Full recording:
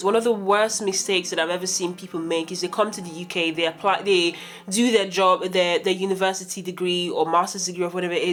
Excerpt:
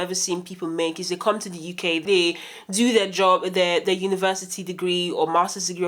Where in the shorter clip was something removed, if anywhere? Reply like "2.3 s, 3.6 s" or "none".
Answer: 2.0 s